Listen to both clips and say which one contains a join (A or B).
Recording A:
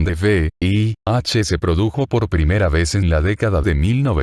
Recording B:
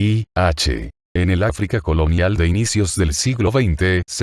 B